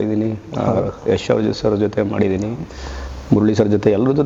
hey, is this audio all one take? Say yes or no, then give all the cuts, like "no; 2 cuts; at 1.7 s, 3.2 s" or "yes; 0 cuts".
yes; 0 cuts